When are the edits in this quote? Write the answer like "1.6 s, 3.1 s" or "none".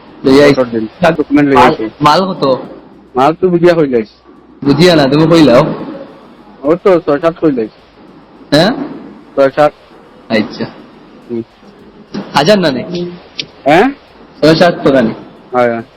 1.1 s